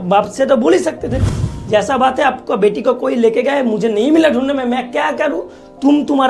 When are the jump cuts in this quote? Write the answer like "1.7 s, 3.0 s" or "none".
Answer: none